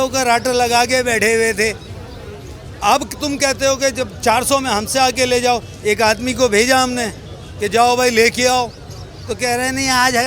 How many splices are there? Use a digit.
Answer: 0